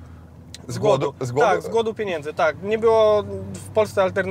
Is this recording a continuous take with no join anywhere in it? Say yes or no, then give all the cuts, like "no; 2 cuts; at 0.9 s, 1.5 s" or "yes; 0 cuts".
yes; 0 cuts